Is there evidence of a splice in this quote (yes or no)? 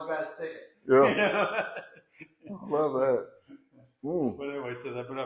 no